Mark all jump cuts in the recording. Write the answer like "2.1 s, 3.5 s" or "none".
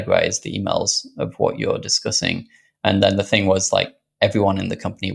none